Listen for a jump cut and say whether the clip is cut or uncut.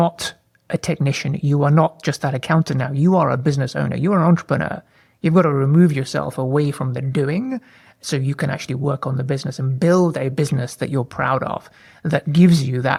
uncut